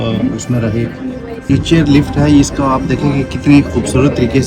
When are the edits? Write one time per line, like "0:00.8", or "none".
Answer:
0:01.5